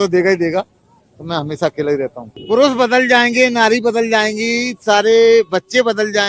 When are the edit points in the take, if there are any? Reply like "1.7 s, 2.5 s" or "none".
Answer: 2.3 s